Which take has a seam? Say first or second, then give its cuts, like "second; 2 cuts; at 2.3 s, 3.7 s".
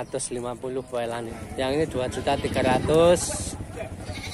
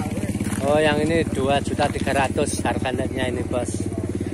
first; 1 cut; at 1.3 s